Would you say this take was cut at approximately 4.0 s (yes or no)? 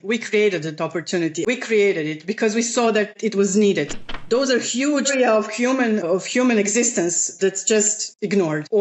yes